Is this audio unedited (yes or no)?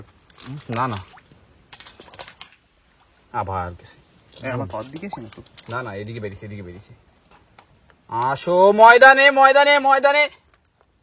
yes